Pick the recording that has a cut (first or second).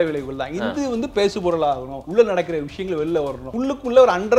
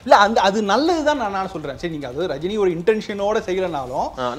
first